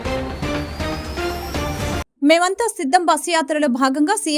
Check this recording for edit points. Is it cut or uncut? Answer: uncut